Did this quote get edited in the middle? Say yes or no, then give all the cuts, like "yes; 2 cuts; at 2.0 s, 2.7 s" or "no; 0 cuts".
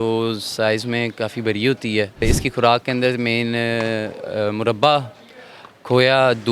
yes; 1 cut; at 2.2 s